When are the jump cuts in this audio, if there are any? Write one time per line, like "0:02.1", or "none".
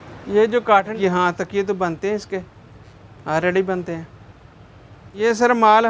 0:00.9
0:05.1